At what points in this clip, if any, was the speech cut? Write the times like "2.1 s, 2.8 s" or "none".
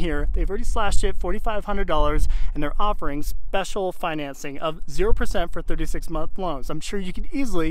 none